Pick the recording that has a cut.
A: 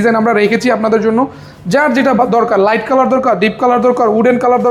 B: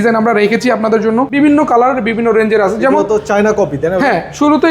B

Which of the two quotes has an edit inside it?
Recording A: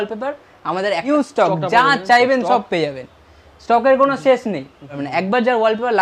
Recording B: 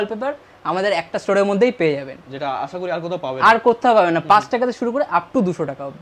A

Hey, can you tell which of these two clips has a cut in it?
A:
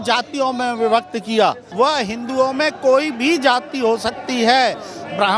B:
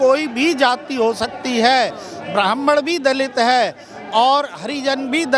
A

